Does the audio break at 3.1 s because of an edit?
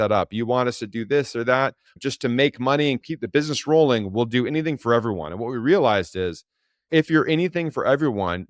yes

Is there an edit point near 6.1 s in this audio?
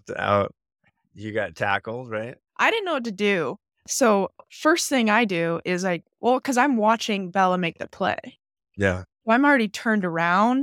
no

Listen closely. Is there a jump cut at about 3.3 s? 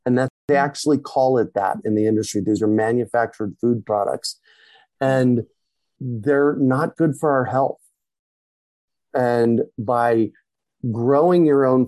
no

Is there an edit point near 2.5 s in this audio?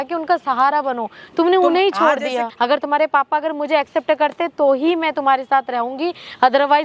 yes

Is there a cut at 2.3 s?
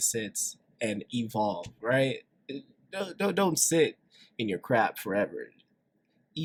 no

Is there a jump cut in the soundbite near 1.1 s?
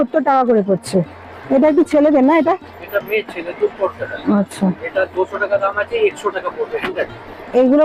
no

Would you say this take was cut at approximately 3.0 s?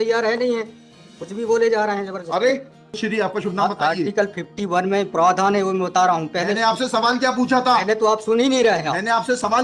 yes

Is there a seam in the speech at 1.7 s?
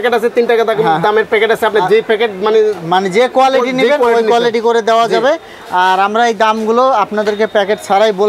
no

